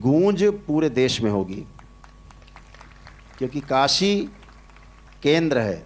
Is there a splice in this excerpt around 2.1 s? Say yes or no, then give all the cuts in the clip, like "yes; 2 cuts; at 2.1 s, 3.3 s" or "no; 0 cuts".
no; 0 cuts